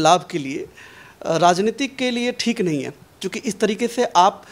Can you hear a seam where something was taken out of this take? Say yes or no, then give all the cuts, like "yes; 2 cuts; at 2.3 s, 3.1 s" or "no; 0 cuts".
no; 0 cuts